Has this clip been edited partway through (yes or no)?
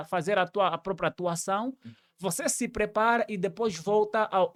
no